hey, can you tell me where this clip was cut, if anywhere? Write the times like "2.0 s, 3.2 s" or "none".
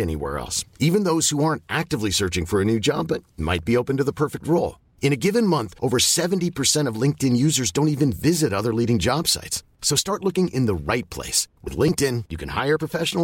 none

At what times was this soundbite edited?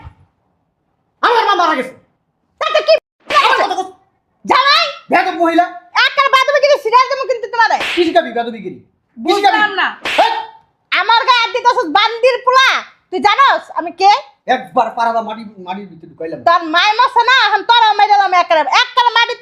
none

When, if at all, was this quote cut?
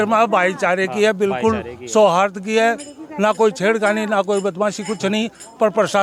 none

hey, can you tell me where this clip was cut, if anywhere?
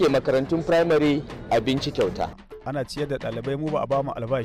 2.3 s

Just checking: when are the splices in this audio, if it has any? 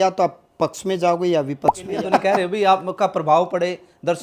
1.9 s

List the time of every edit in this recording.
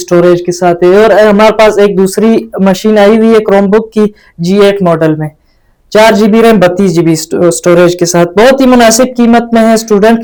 none

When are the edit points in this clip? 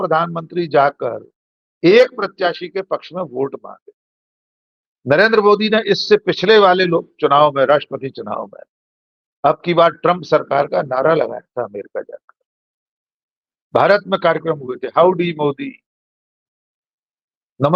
none

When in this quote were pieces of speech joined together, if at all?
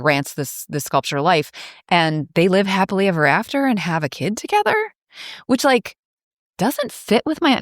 2.2 s

